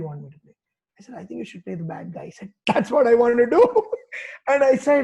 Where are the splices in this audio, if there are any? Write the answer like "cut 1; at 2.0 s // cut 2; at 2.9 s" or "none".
none